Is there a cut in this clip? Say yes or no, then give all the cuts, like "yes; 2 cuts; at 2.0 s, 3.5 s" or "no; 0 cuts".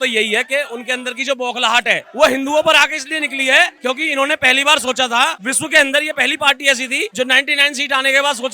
yes; 3 cuts; at 3.7 s, 5.4 s, 7.1 s